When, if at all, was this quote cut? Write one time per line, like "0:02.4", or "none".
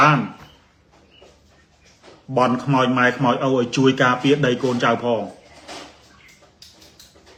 none